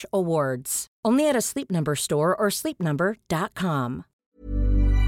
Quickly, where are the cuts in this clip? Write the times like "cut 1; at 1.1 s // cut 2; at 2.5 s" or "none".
cut 1; at 4.1 s